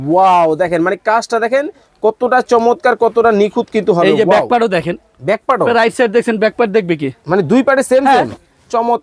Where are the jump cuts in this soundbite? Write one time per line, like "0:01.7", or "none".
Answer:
none